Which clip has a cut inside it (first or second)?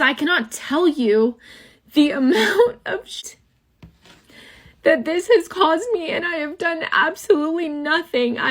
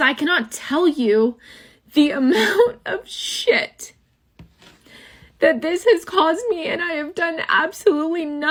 first